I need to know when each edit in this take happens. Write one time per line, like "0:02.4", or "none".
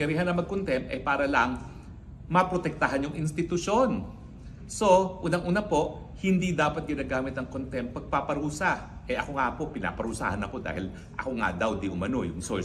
none

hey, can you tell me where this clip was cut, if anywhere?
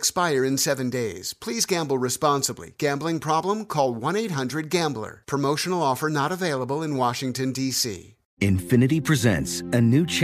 0:08.2

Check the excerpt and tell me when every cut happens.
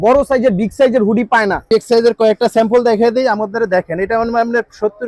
0:01.7

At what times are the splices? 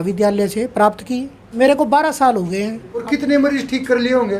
0:01.4
0:03.0

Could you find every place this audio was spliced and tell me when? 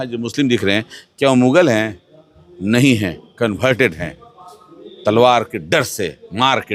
none

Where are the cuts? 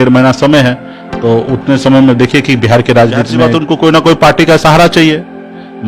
0:03.5

